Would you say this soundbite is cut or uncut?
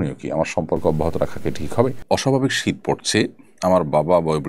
cut